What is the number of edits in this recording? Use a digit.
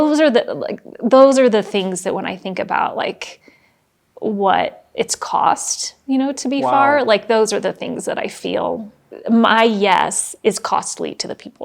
1